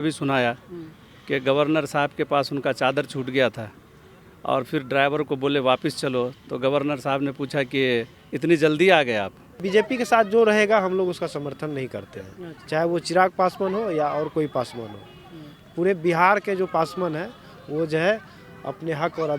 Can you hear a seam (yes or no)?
yes